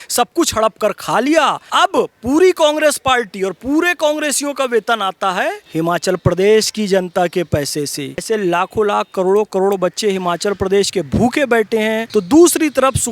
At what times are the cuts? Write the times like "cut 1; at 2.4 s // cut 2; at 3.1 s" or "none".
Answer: cut 1; at 1.6 s // cut 2; at 5.6 s // cut 3; at 8.2 s // cut 4; at 12.0 s

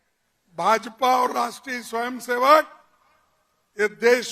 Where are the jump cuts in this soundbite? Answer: none

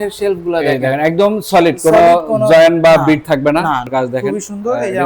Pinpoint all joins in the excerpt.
cut 1; at 3.9 s

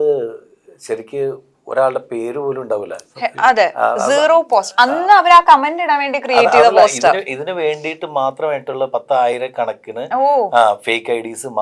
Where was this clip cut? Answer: none

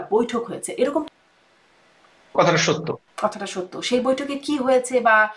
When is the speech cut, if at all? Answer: cut 1; at 1.0 s

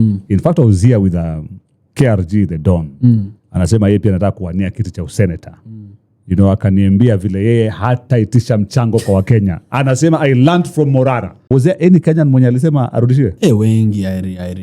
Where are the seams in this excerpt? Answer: cut 1; at 11.4 s

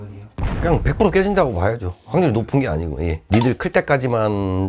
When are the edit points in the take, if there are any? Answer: cut 1; at 3.2 s

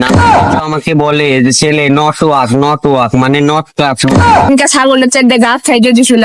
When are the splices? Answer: cut 1; at 4.5 s

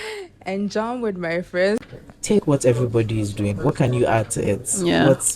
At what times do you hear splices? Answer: cut 1; at 1.8 s

